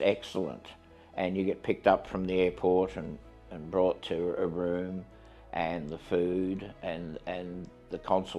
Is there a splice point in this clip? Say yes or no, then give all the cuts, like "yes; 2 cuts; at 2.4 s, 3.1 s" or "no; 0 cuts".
no; 0 cuts